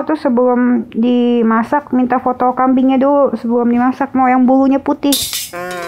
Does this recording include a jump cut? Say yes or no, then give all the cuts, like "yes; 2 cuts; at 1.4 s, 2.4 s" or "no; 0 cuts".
no; 0 cuts